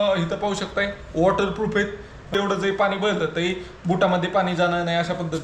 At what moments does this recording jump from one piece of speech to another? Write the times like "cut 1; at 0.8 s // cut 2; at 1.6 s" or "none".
cut 1; at 2.3 s